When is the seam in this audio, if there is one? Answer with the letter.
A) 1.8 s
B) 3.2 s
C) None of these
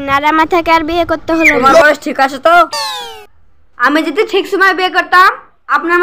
A